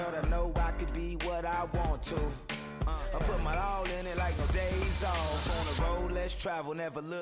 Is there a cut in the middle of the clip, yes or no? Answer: no